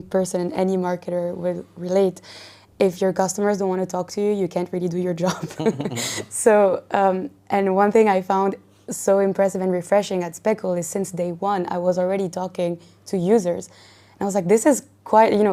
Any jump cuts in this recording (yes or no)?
no